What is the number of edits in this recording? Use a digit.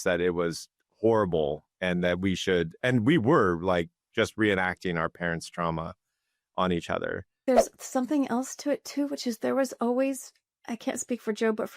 1